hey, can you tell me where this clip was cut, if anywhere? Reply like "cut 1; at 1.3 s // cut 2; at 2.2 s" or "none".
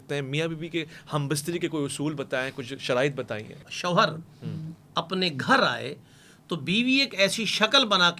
cut 1; at 3.6 s